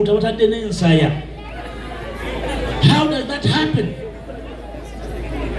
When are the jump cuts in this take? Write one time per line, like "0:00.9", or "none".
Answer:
none